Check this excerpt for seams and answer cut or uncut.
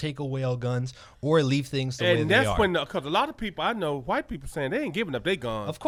uncut